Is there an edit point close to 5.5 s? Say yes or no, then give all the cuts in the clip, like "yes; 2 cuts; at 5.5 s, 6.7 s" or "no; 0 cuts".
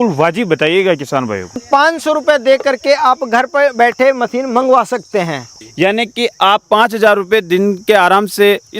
yes; 2 cuts; at 1.6 s, 5.5 s